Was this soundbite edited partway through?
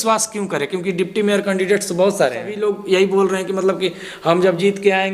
yes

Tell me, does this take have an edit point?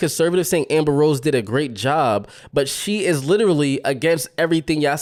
no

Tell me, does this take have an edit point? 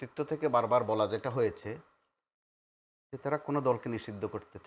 no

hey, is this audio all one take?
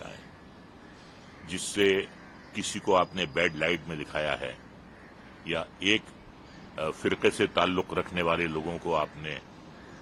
yes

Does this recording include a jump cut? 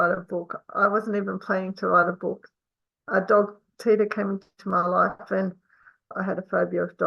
yes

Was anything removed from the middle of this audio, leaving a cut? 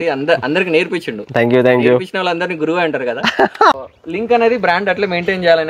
yes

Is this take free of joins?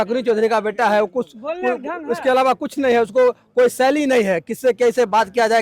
yes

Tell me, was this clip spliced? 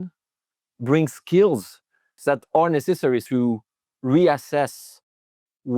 yes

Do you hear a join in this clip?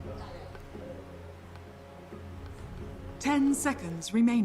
yes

